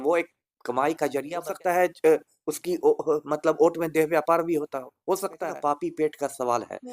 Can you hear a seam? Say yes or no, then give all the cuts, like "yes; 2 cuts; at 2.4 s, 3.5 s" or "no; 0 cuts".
yes; 2 cuts; at 1.5 s, 5.5 s